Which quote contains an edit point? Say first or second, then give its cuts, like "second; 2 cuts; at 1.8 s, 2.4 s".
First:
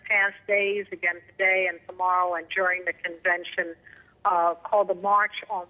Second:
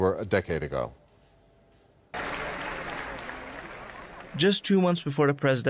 second; 1 cut; at 4.0 s